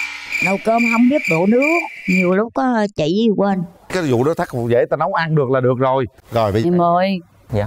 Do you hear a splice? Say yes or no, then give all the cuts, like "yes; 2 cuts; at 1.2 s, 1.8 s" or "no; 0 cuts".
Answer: yes; 1 cut; at 6.6 s